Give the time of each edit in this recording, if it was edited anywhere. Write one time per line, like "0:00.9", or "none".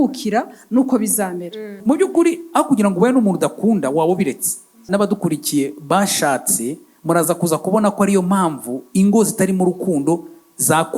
0:01.8
0:04.8